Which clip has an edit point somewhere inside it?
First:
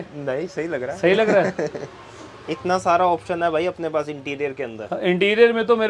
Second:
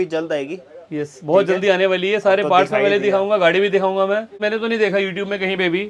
second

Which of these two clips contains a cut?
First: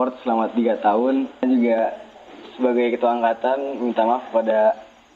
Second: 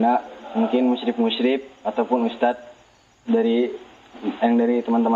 first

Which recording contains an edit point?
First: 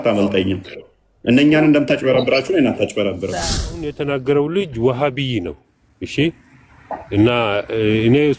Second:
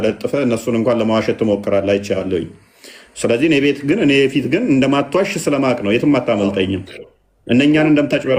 first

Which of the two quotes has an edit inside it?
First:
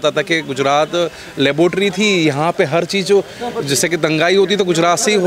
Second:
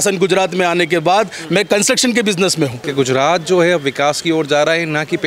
second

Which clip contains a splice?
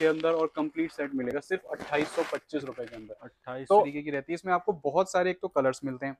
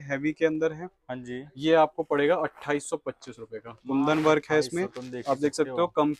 first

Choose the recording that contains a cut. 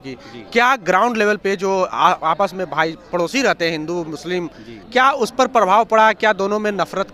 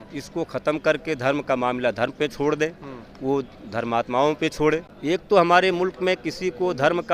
second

